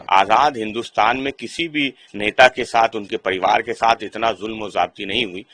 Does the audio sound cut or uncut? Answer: uncut